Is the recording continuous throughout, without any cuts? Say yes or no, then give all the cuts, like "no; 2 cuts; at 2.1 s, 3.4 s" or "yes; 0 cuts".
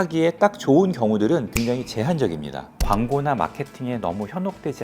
no; 2 cuts; at 1.5 s, 2.7 s